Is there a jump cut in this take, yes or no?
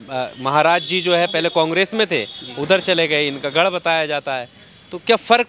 no